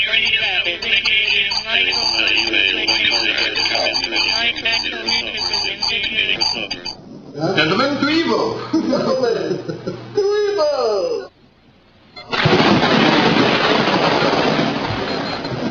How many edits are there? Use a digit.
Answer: 1